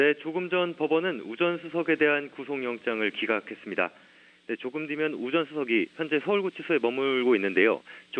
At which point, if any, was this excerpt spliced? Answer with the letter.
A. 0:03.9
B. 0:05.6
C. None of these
A